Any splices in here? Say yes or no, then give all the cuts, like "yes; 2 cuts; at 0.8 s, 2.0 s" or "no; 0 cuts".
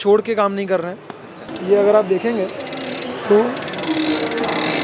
yes; 1 cut; at 1.5 s